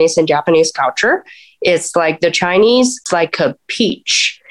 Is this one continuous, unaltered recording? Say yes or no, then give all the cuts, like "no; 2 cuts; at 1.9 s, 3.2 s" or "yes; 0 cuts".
no; 1 cut; at 3.0 s